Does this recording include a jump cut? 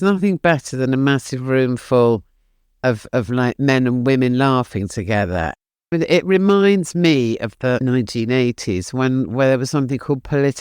yes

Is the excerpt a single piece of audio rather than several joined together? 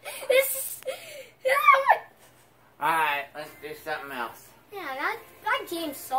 yes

